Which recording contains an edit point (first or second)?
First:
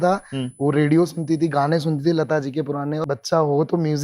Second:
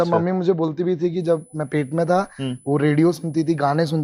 first